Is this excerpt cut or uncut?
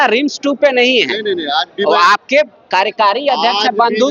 uncut